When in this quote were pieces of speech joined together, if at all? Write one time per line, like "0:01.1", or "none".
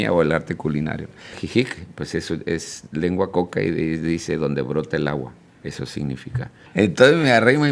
0:01.4
0:06.7